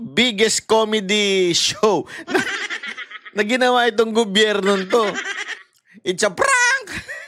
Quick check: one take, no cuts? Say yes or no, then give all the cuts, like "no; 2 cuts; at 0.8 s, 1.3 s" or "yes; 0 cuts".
yes; 0 cuts